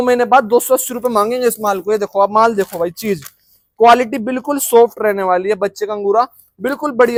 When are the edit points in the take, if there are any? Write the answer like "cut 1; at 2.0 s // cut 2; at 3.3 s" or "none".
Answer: none

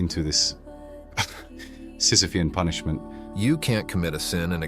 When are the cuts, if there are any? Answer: cut 1; at 3.2 s

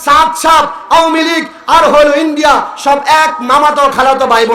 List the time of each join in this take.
none

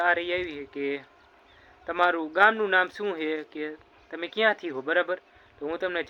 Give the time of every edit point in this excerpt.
none

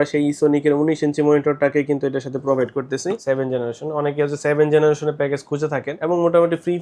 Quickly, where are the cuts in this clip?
cut 1; at 3.2 s // cut 2; at 5.9 s

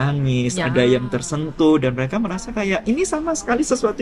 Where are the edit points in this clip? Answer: none

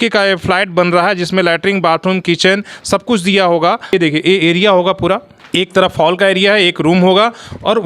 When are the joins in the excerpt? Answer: cut 1; at 3.9 s // cut 2; at 5.4 s

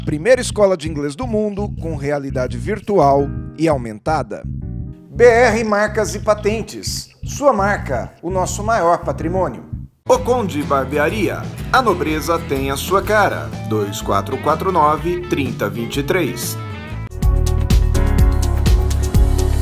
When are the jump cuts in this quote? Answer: cut 1; at 17.1 s

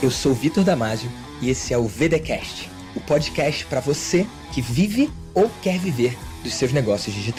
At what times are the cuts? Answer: none

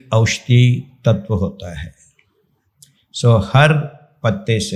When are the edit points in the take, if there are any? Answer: none

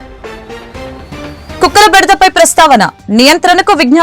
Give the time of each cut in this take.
cut 1; at 1.6 s

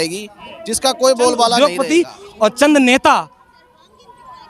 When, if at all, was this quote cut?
cut 1; at 1.6 s

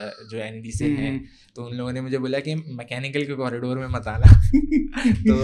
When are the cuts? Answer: none

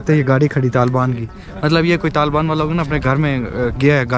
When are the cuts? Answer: none

